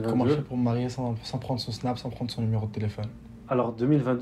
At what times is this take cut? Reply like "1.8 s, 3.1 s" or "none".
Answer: none